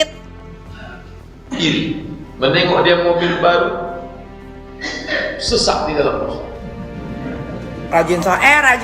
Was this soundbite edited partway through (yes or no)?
yes